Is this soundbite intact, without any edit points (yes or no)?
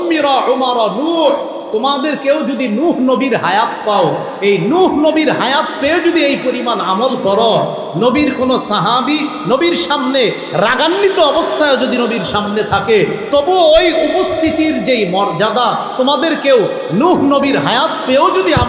yes